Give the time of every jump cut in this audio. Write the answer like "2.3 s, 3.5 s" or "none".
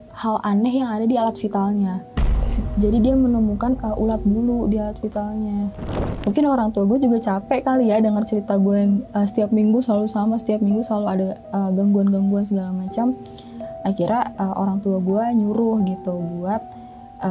6.1 s